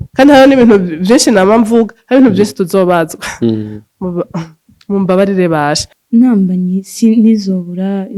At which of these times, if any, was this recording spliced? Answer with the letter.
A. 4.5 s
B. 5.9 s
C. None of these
B